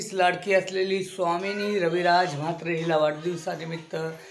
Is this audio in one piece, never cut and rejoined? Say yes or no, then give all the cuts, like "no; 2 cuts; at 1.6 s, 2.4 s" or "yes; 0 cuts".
yes; 0 cuts